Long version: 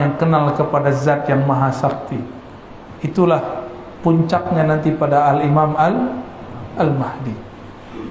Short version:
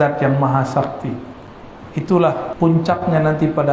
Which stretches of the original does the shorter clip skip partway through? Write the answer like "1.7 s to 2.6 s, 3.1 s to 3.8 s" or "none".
3.5 s to 3.9 s